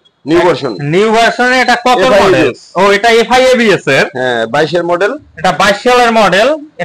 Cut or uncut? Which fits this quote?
uncut